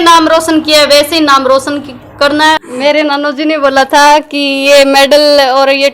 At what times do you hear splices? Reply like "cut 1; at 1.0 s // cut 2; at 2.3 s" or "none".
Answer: cut 1; at 2.6 s

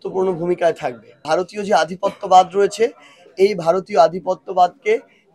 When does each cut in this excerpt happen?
cut 1; at 1.2 s

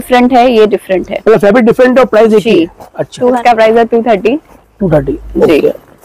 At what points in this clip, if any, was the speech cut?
cut 1; at 3.2 s

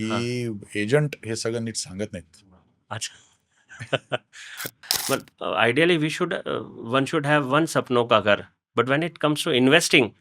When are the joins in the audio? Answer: cut 1; at 4.8 s

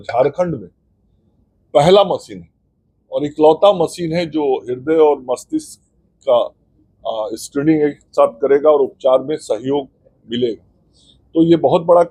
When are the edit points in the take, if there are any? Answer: none

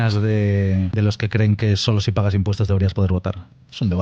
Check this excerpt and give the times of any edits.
cut 1; at 0.9 s

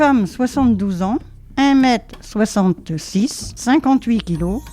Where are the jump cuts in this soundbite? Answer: cut 1; at 1.4 s // cut 2; at 3.5 s

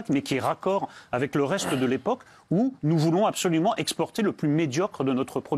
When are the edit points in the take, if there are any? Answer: none

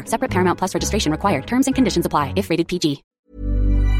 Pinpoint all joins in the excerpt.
cut 1; at 3.1 s

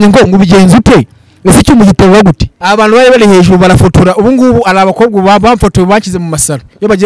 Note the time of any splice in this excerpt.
cut 1; at 2.5 s

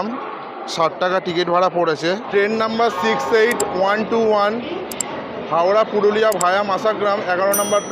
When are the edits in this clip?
cut 1; at 2.2 s

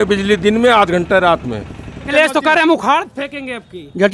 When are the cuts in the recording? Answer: cut 1; at 2.1 s

